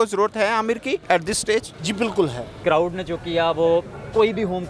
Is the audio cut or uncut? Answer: cut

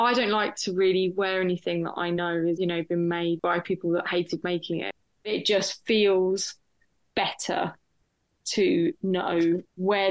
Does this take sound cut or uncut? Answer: cut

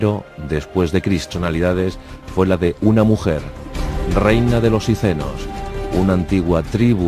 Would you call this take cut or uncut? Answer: uncut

